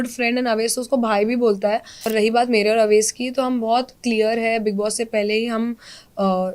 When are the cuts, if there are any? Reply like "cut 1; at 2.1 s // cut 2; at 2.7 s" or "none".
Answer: cut 1; at 2.1 s